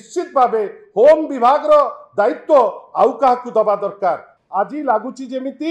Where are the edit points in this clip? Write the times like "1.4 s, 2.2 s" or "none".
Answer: 4.3 s